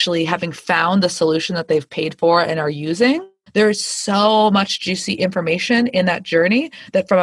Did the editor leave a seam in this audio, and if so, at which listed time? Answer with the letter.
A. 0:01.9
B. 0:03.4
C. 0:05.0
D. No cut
B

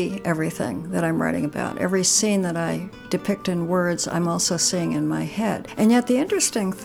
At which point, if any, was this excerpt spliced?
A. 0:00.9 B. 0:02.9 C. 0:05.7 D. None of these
C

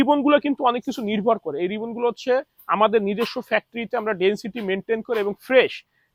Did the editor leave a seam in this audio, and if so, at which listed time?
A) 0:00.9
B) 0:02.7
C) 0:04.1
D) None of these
D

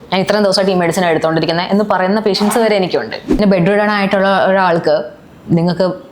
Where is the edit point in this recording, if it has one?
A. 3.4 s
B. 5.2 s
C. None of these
A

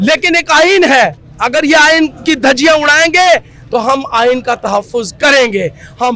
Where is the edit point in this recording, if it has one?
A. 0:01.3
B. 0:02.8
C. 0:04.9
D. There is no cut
D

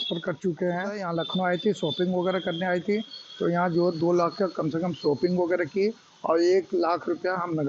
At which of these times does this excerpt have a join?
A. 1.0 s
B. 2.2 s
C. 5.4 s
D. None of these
A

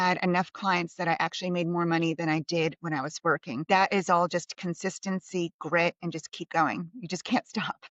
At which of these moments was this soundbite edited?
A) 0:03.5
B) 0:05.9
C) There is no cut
A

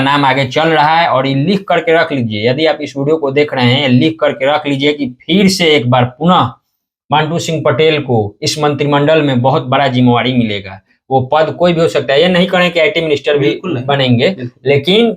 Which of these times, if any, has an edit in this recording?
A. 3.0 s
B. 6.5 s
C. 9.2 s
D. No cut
D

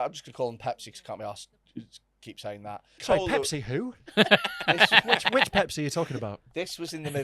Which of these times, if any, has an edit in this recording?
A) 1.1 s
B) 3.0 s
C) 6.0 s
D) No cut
B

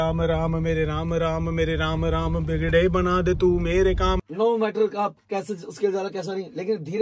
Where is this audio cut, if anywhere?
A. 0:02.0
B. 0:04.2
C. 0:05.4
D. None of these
B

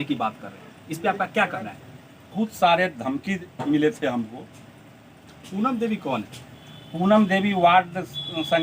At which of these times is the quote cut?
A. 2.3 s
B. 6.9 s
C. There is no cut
A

